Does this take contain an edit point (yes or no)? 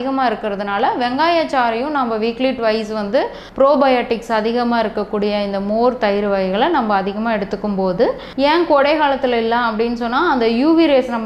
yes